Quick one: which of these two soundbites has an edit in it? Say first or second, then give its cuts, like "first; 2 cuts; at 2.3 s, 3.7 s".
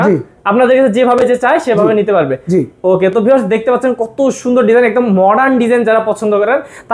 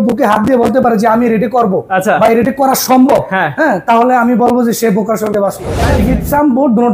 second; 1 cut; at 5.9 s